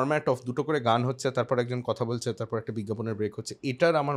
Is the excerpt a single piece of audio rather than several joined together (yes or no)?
yes